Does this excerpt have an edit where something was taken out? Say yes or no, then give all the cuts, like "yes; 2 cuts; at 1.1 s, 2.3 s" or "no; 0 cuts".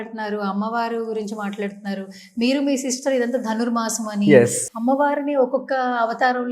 yes; 1 cut; at 4.6 s